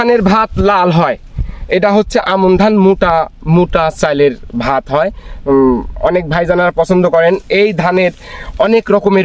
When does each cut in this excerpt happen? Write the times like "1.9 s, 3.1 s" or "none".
none